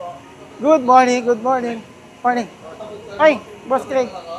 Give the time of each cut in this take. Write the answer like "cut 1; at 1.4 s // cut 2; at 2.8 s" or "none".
none